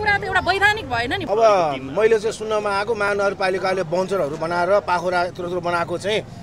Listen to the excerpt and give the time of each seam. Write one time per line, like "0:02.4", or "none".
0:01.2